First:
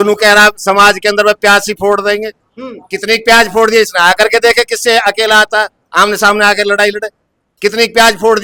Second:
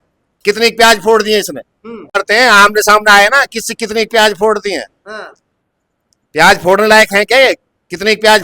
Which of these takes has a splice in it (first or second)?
second